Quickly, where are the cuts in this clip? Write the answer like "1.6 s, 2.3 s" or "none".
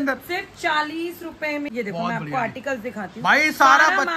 1.7 s